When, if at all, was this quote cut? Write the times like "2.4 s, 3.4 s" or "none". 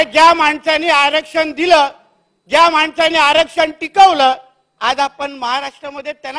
none